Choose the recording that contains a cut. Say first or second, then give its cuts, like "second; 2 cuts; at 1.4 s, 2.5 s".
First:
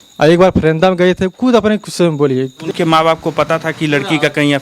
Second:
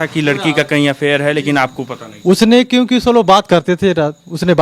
first; 1 cut; at 2.5 s